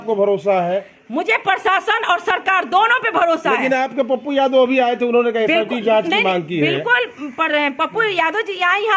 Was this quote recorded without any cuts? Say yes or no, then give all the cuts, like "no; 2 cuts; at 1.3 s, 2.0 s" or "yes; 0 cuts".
yes; 0 cuts